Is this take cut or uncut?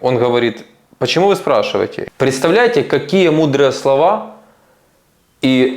cut